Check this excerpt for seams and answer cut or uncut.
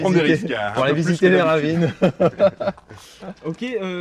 uncut